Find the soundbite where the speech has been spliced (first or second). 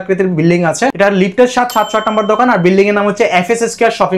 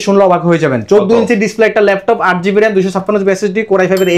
first